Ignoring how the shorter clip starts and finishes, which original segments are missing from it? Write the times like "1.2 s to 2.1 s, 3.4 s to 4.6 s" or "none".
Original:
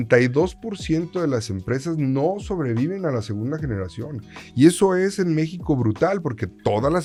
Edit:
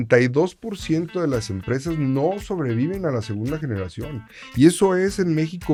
none

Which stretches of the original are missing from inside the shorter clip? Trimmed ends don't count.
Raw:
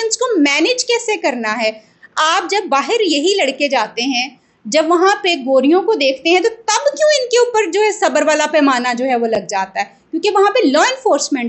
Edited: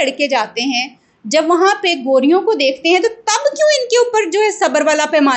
none

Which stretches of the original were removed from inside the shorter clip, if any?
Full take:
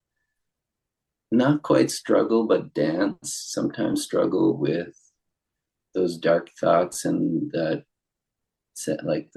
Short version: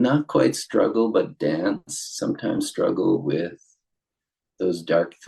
none

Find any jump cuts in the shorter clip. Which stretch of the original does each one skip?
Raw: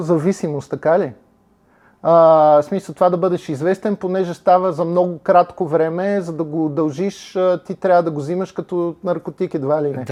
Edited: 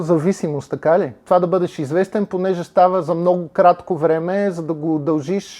1.2 s to 2.9 s

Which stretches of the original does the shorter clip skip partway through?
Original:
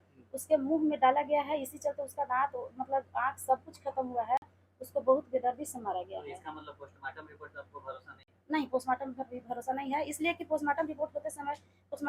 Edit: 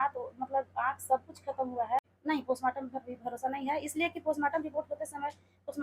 4.5 s to 8.4 s

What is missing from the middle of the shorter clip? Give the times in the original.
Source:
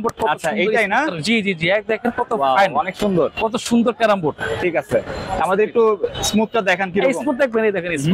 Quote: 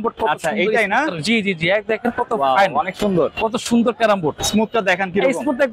4.4 s to 6.2 s

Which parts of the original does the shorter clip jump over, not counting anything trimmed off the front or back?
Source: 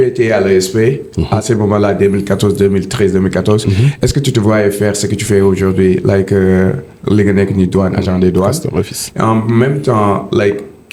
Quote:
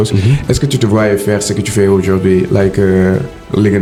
none

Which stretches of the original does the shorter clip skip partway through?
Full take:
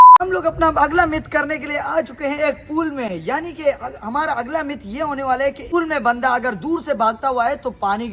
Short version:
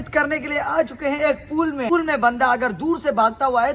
3.1 s to 5.7 s

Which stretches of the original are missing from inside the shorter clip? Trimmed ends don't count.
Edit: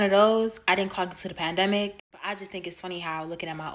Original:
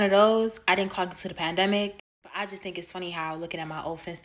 2.1 s to 2.2 s

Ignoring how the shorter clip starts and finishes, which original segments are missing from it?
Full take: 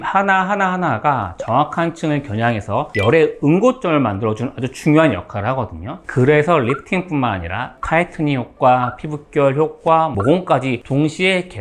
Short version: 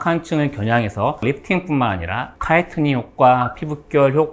2.9 s to 6.6 s

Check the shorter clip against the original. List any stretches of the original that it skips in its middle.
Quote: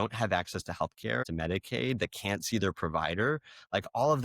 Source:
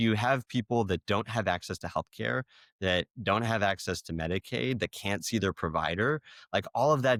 2.4 s to 4.1 s

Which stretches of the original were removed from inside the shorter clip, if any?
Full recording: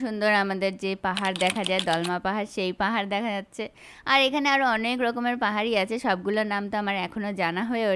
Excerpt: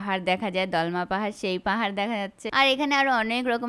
3.5 s to 3.9 s

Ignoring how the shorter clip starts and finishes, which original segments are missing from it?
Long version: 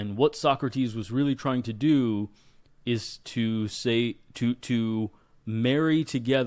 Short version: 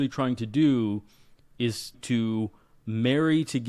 3.3 s to 4.6 s

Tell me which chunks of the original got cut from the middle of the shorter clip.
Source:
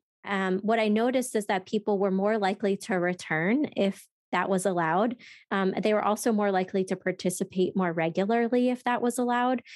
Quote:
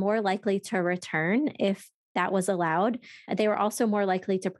5.5 s to 5.7 s

